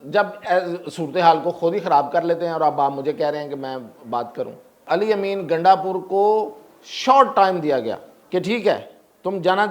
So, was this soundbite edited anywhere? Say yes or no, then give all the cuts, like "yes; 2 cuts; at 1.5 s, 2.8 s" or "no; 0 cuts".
yes; 2 cuts; at 4.8 s, 8.1 s